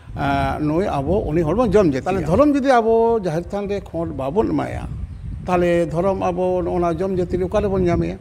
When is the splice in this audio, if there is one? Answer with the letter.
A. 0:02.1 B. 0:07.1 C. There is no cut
A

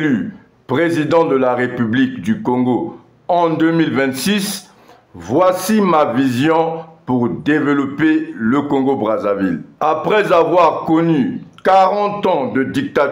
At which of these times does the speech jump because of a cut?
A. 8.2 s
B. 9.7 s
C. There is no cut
B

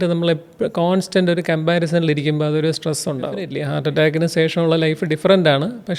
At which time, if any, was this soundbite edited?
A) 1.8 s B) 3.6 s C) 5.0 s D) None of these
B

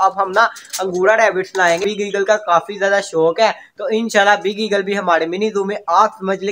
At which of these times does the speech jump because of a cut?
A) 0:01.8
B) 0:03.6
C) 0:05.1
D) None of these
A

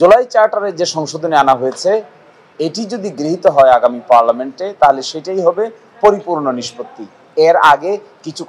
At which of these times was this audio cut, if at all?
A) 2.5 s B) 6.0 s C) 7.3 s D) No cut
D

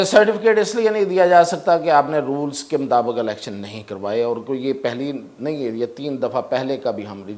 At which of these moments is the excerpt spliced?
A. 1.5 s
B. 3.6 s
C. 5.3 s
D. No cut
D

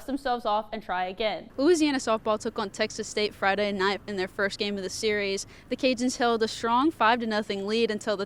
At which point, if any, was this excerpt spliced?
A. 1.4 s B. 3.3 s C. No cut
A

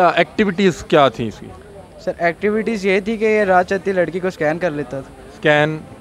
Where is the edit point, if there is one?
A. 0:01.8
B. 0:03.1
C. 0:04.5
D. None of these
D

